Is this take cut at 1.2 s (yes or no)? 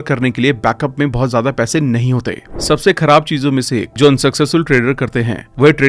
no